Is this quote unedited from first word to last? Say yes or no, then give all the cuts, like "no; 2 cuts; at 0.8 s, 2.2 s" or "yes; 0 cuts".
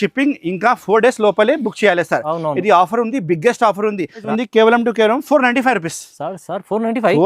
no; 1 cut; at 4.2 s